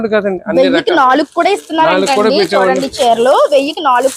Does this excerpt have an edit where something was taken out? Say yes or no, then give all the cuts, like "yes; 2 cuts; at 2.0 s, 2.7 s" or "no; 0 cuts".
no; 0 cuts